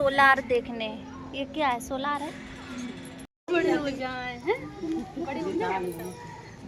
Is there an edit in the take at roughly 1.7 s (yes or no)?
no